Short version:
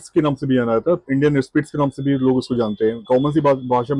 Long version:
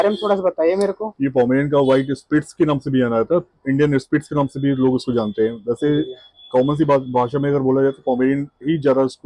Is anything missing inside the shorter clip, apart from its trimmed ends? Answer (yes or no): yes